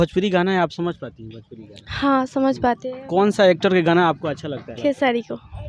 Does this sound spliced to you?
yes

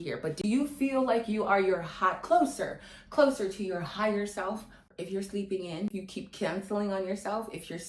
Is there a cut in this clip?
yes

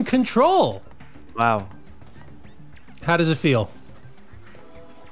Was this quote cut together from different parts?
no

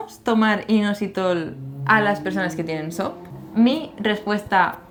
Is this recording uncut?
yes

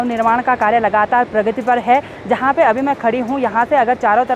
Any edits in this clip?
no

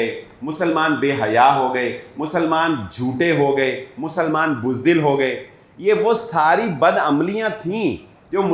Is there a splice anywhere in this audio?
no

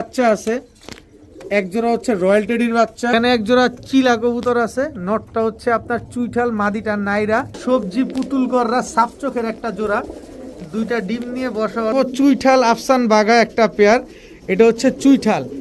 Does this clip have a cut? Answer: yes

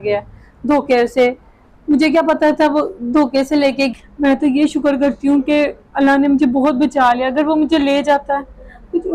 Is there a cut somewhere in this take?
yes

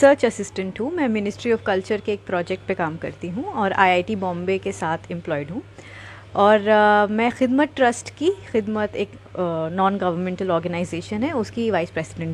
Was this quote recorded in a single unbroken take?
yes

